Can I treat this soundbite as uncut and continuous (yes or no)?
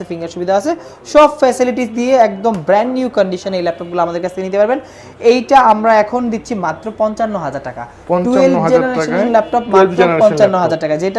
yes